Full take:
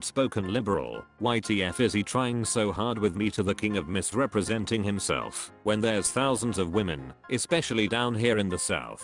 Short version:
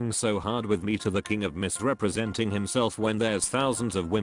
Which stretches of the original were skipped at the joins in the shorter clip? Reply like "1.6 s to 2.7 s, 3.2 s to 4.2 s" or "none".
5.4 s to 5.7 s